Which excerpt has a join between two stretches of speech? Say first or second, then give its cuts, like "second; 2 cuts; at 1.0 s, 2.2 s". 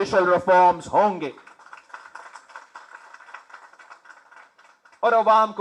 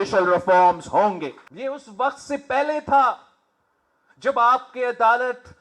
second; 1 cut; at 1.4 s